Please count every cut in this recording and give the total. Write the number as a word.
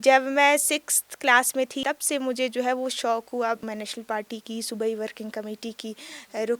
two